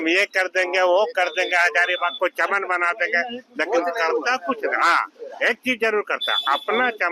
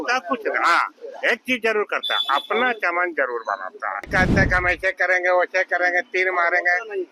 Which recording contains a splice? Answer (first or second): second